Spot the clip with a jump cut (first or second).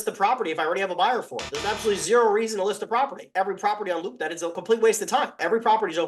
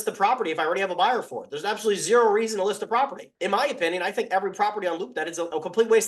first